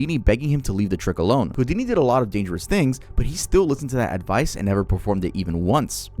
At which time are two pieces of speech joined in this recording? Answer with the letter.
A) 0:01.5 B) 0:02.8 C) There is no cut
A